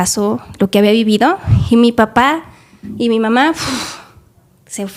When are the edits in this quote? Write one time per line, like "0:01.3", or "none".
none